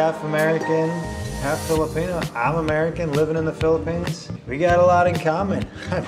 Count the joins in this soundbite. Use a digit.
1